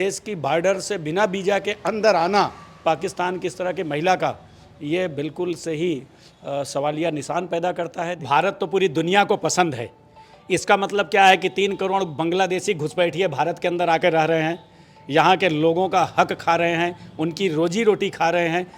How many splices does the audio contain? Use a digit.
1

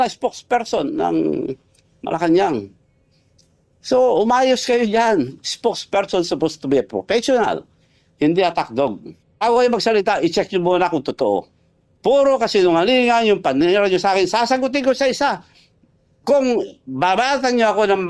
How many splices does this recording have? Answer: 1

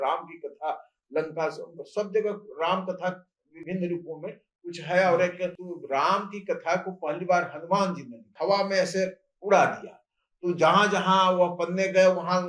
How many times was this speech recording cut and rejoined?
2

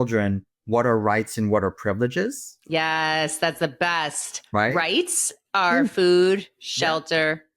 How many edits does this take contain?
0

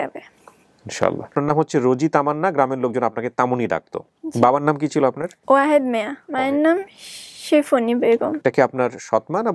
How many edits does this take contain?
4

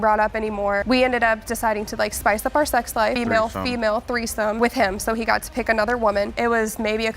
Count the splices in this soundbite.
2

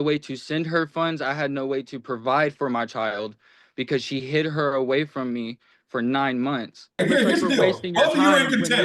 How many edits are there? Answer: 1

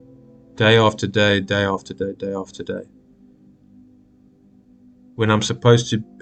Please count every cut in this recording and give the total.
0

